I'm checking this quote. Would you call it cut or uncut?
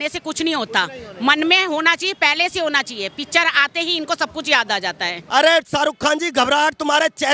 cut